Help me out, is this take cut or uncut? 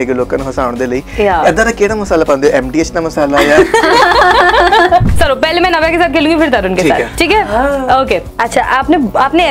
cut